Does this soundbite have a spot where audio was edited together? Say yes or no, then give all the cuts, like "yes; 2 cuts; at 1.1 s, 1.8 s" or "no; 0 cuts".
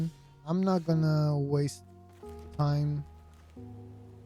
yes; 1 cut; at 3.3 s